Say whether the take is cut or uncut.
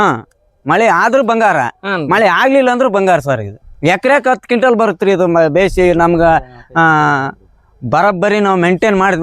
cut